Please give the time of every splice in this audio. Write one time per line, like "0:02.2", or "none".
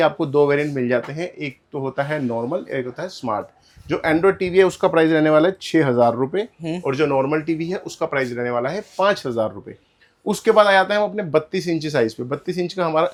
none